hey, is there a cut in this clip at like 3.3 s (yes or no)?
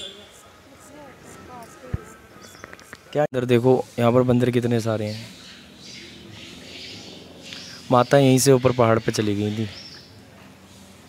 yes